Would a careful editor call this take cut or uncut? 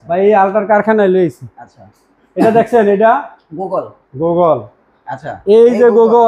uncut